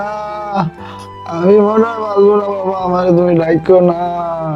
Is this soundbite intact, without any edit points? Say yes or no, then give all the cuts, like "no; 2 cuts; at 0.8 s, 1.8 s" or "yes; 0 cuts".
yes; 0 cuts